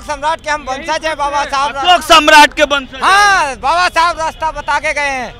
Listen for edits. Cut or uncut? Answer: uncut